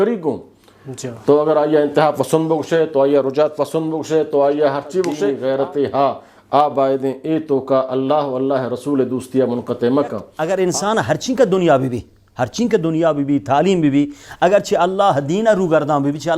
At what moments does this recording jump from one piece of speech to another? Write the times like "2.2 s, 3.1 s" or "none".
5.3 s, 10.3 s